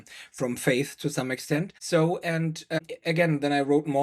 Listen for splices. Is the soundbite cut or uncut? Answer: cut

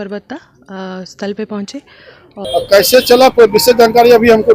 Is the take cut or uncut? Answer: cut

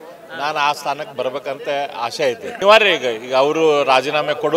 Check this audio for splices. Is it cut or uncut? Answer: cut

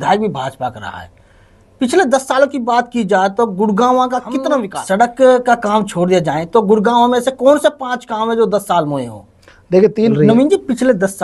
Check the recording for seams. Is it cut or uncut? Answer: cut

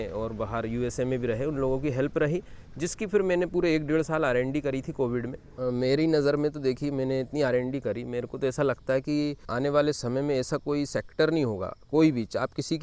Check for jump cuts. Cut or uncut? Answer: cut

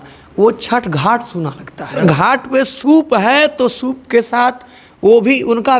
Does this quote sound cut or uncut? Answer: cut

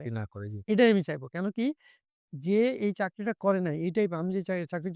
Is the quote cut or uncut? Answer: uncut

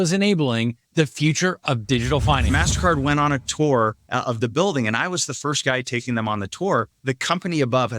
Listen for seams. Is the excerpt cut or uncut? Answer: cut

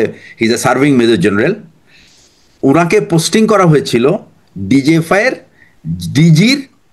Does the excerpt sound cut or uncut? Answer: uncut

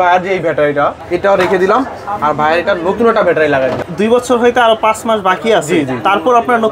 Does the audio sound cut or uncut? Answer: cut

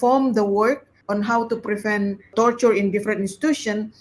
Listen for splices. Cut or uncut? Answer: cut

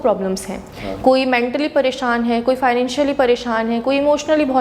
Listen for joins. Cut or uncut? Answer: uncut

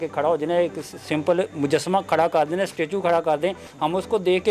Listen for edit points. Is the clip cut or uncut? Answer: uncut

